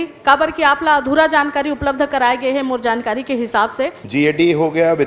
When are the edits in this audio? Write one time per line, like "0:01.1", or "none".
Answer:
0:04.0